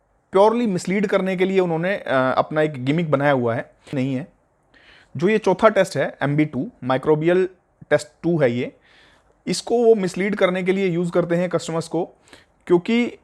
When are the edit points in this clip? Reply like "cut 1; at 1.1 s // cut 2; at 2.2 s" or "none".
cut 1; at 3.9 s